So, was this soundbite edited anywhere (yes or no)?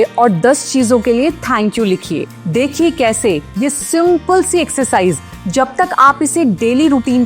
yes